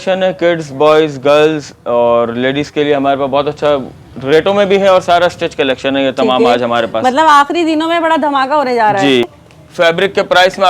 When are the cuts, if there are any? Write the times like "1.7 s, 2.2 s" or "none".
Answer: 9.4 s